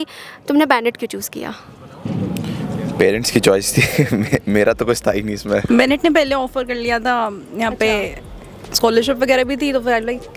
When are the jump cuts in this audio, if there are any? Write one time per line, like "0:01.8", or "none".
none